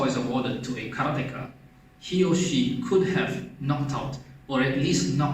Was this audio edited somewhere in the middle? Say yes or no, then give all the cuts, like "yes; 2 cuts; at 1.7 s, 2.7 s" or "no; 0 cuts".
no; 0 cuts